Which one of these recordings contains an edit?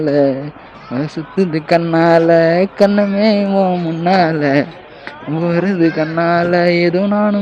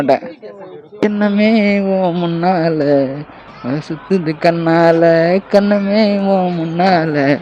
second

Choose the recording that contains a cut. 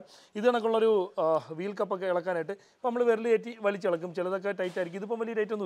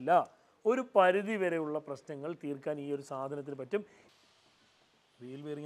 second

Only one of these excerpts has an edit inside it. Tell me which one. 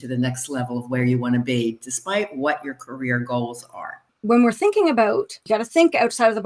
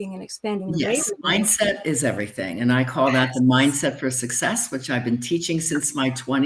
first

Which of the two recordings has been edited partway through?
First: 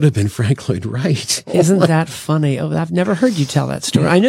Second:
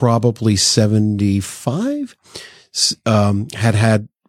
first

